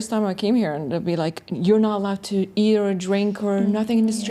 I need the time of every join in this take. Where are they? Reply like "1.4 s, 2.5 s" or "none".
none